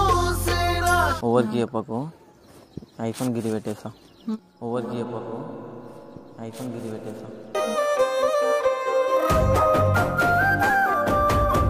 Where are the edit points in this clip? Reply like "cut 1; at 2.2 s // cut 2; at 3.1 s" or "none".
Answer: cut 1; at 1.1 s